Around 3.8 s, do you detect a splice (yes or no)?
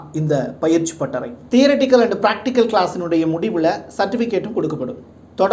no